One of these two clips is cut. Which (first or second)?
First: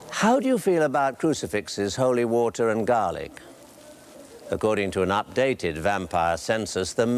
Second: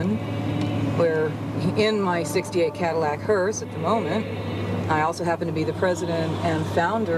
first